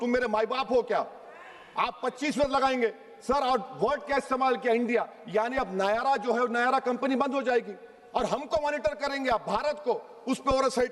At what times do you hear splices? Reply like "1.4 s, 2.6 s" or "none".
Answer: none